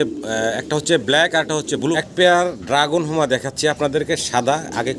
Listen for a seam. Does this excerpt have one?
yes; 1 cut; at 1.9 s

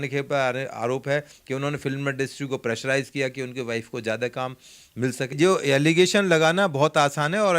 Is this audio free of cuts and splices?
no; 1 cut; at 5.4 s

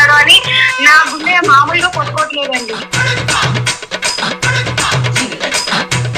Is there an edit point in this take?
yes; 1 cut; at 2.9 s

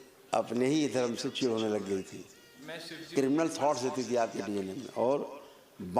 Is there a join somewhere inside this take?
yes; 1 cut; at 2.9 s

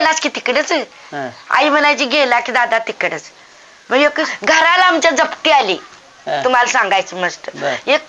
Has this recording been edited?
yes; 1 cut; at 4.3 s

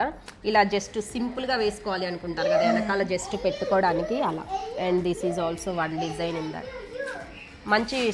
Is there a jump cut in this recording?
no; 0 cuts

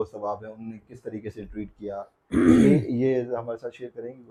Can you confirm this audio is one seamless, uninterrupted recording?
yes; 0 cuts

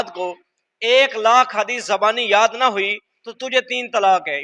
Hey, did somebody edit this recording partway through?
no; 0 cuts

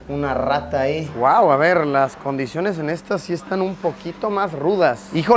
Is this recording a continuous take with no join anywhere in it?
no; 1 cut; at 1.1 s

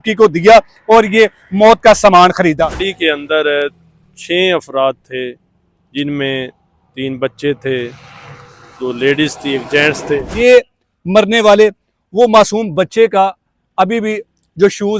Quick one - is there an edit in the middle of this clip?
yes; 2 cuts; at 2.9 s, 10.3 s

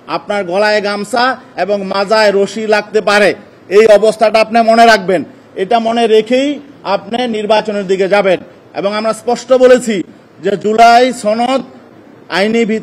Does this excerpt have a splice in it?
no; 0 cuts

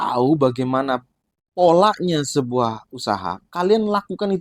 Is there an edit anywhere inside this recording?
no; 0 cuts

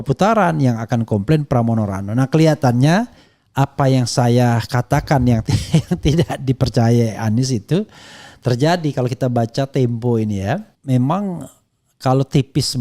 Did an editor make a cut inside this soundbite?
yes; 1 cut; at 10.7 s

